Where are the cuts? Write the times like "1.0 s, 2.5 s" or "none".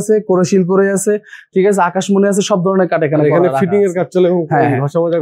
none